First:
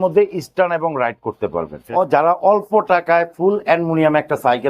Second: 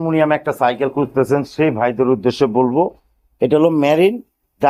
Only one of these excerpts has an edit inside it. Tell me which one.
first; 1 cut; at 1.8 s

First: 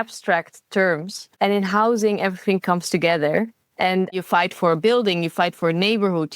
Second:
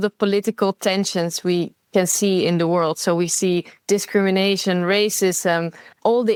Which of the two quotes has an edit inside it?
first; 2 cuts; at 1.2 s, 4.2 s

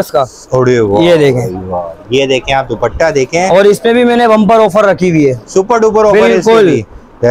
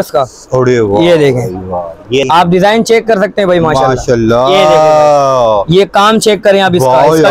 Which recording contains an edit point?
second; 1 cut; at 2.2 s

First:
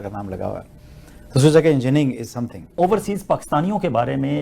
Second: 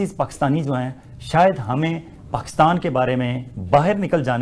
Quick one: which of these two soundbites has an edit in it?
first; 1 cut; at 2.8 s

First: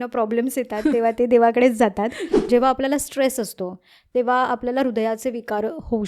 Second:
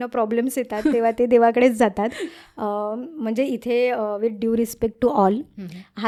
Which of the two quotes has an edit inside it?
first; 1 cut; at 2.5 s

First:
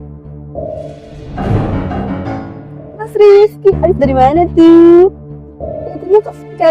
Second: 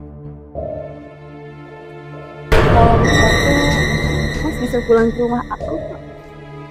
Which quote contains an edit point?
first; 2 cuts; at 1.2 s, 3.0 s

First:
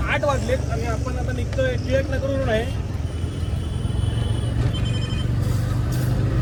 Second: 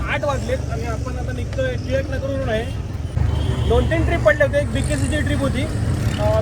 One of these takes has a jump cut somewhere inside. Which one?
second; 1 cut; at 3.2 s

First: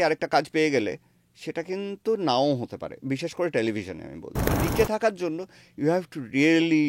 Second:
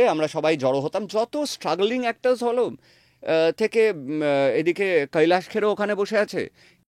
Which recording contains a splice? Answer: first; 1 cut; at 4.6 s

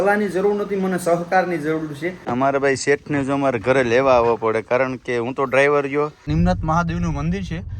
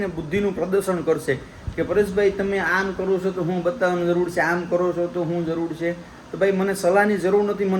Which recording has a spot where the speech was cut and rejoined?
first; 2 cuts; at 2.2 s, 6.3 s

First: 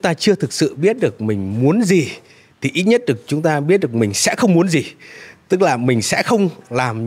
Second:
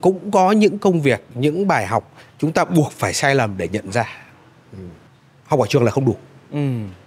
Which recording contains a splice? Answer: second; 1 cut; at 5.1 s

